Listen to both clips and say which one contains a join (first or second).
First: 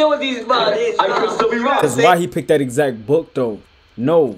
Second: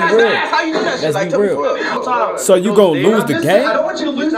second